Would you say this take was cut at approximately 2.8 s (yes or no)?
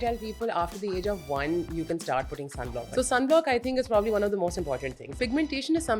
yes